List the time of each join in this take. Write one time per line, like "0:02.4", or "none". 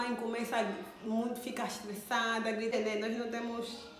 0:02.7